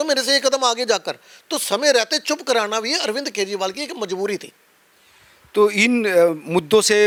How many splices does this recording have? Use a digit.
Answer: 0